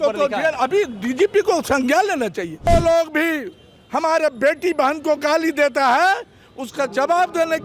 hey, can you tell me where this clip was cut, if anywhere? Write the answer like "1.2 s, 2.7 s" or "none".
2.7 s